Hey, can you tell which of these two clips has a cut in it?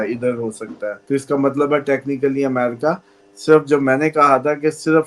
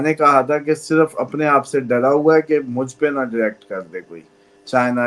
first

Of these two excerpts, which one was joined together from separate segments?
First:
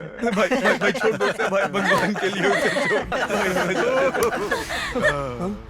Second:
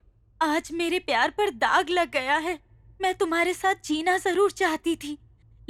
first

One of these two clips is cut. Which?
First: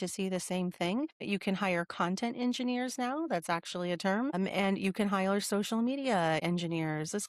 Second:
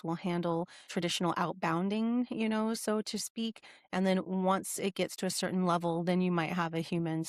first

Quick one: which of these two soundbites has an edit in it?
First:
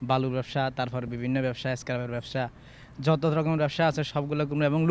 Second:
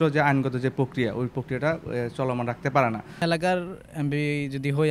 second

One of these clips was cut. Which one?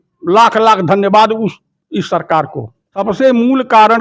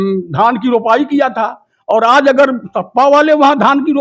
first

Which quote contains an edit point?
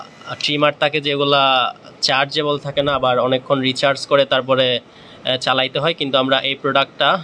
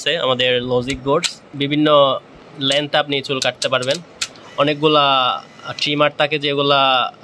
second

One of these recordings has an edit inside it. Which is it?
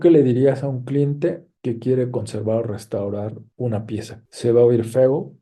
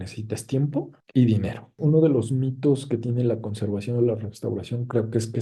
second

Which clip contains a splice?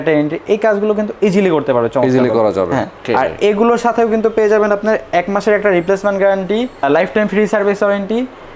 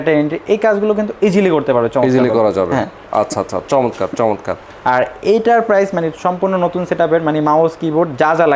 first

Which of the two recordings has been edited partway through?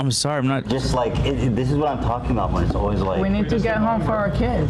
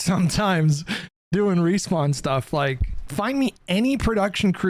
second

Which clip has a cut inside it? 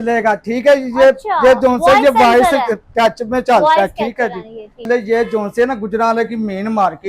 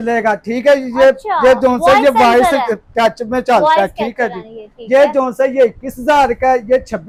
first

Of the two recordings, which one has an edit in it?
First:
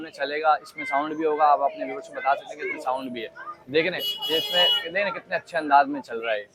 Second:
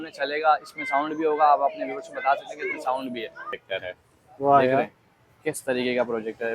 second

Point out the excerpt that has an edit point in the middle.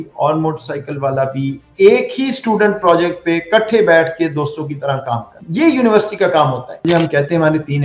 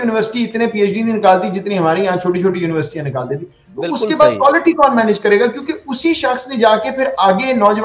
first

